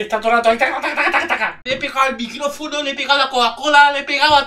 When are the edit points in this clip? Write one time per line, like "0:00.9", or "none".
0:01.6